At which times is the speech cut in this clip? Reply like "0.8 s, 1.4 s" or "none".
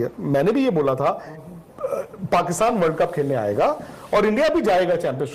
1.4 s